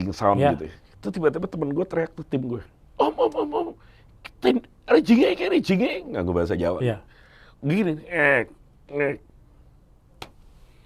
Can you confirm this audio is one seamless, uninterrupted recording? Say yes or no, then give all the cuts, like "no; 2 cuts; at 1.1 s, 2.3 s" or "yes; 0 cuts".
yes; 0 cuts